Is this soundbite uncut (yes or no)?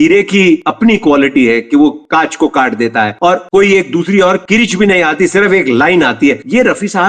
yes